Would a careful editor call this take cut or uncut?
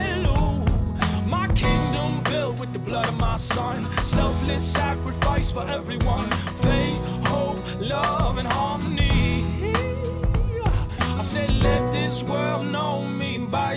uncut